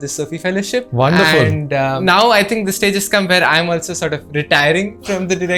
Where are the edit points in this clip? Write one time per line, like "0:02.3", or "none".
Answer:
0:00.9
0:02.0